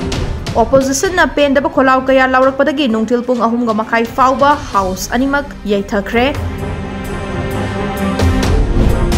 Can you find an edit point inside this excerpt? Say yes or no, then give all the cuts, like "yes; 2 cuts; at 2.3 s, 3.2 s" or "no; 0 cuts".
no; 0 cuts